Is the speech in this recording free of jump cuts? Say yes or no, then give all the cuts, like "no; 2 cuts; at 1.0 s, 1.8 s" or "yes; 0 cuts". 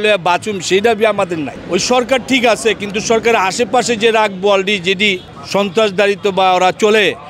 no; 2 cuts; at 1.5 s, 5.3 s